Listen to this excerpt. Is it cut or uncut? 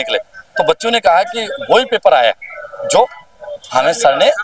uncut